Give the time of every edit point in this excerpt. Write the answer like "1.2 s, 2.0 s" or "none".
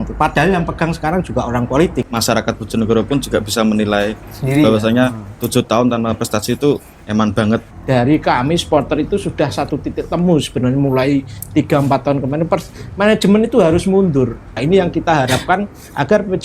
2.1 s, 6.9 s, 7.7 s, 14.6 s